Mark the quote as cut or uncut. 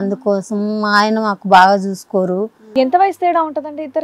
cut